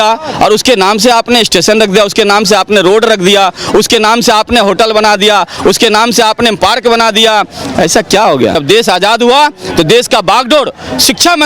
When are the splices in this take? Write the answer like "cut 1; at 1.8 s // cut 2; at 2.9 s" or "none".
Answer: cut 1; at 8.6 s